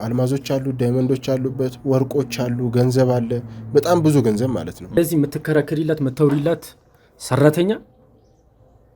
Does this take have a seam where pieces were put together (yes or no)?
yes